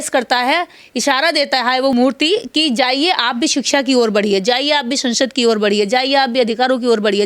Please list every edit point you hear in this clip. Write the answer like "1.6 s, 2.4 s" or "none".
1.9 s